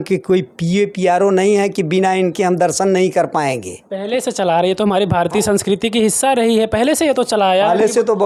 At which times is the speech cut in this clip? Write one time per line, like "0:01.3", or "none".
none